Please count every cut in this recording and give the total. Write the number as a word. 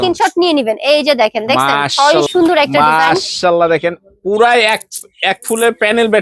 one